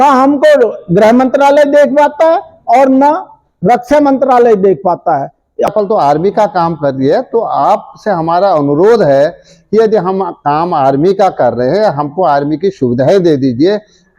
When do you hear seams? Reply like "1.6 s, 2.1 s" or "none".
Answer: 5.7 s